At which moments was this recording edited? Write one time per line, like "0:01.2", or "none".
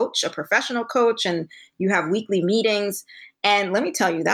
none